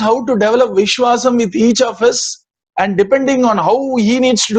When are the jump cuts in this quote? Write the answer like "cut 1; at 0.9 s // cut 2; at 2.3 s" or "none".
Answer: none